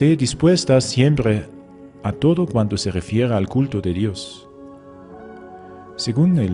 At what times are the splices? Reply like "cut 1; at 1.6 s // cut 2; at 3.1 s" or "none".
cut 1; at 3.1 s